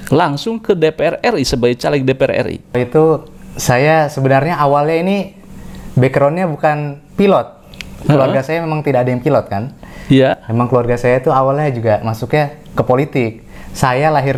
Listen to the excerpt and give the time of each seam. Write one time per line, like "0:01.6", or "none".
none